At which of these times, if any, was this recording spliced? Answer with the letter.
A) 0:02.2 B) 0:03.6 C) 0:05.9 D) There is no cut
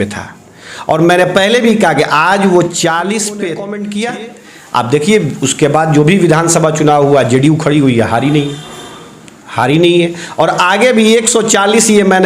B